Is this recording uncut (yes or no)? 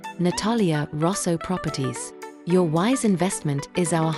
yes